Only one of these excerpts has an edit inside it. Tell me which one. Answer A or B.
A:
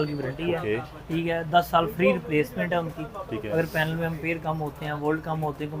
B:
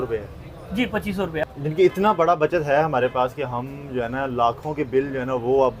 B